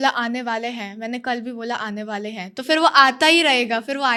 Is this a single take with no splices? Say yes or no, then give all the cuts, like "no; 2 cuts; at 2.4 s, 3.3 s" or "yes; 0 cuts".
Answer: yes; 0 cuts